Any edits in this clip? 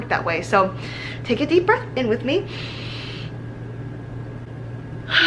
no; 0 cuts

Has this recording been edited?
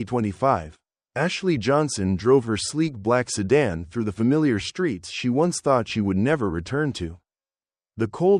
no; 0 cuts

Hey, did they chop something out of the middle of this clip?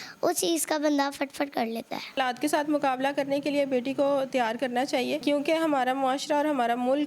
yes; 2 cuts; at 2.1 s, 5.2 s

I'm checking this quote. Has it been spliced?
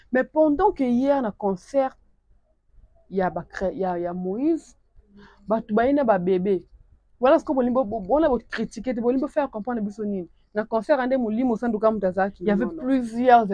yes; 1 cut; at 12.4 s

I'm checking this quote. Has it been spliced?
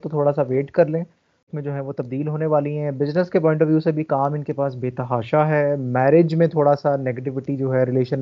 yes; 1 cut; at 1.4 s

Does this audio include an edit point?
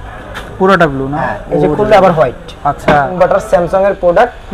yes; 1 cut; at 3.1 s

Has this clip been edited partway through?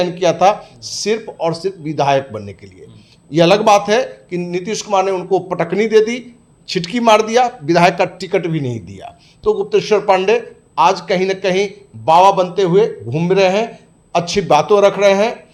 no; 0 cuts

